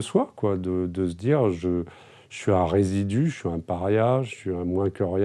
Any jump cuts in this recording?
no; 0 cuts

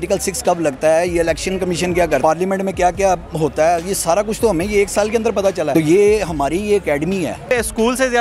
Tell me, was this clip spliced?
yes; 3 cuts; at 2.2 s, 5.7 s, 7.5 s

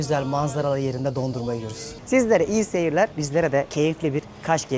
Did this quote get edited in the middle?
yes; 2 cuts; at 1.9 s, 3.7 s

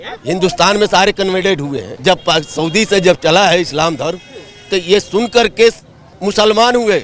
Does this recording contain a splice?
yes; 1 cut; at 1.9 s

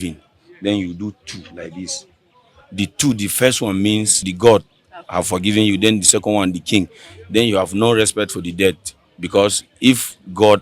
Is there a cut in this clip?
yes; 1 cut; at 4.3 s

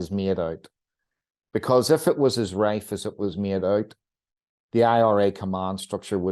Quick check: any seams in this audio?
no; 0 cuts

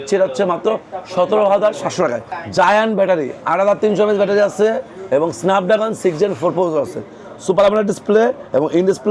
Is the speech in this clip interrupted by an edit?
yes; 1 cut; at 2.3 s

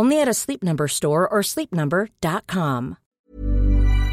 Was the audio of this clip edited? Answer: yes; 1 cut; at 3.1 s

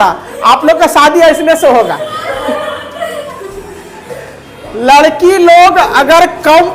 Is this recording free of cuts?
yes; 0 cuts

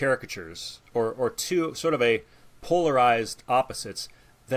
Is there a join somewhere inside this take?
no; 0 cuts

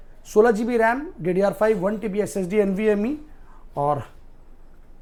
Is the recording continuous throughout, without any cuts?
yes; 0 cuts

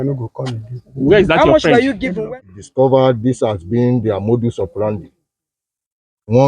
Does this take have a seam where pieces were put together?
yes; 1 cut; at 2.3 s

